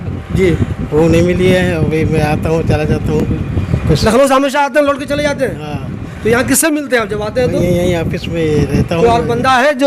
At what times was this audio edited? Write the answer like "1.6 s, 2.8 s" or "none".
none